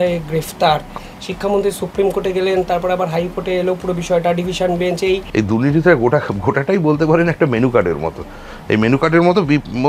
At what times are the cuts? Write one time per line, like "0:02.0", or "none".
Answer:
0:01.0
0:05.3